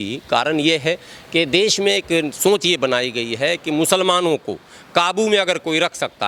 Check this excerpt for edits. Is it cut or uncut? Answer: uncut